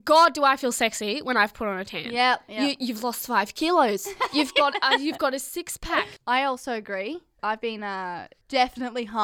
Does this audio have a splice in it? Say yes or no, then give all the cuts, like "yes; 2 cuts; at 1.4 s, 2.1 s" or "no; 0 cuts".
yes; 2 cuts; at 6.1 s, 8.3 s